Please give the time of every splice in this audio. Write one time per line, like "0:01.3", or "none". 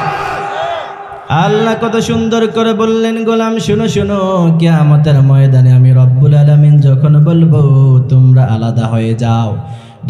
0:01.1